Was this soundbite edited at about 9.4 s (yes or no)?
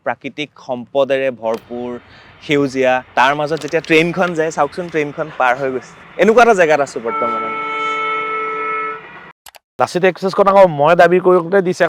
yes